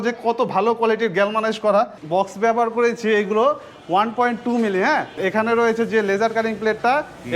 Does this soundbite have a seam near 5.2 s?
yes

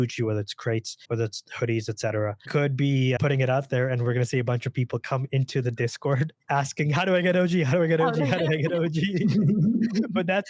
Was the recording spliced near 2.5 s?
yes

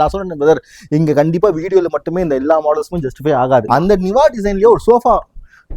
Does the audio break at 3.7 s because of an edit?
yes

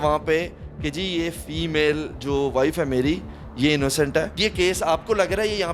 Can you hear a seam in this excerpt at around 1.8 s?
no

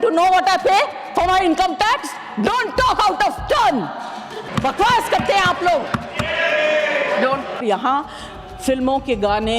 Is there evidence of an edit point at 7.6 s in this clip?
yes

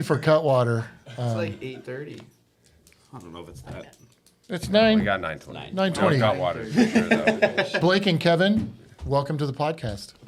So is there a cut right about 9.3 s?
no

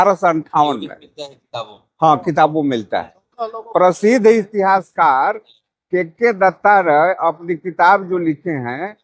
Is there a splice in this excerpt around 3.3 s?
no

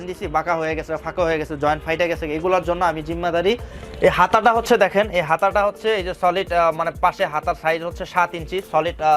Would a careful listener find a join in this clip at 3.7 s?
yes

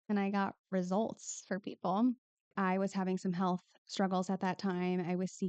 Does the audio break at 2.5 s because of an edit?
yes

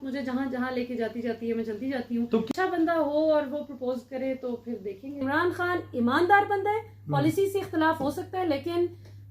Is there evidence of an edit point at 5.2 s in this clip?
yes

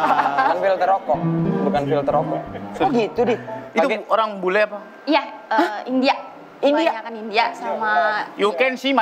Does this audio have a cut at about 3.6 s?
yes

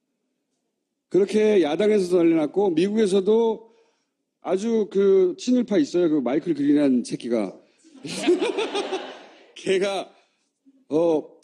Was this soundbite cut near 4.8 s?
yes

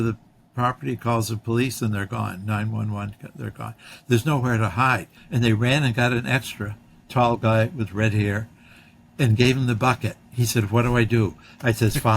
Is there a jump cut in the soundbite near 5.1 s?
yes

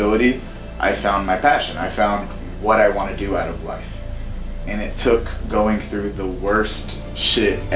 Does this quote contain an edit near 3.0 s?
no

